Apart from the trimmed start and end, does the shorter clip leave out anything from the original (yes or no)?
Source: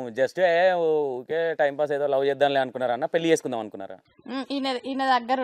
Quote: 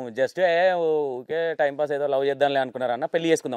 no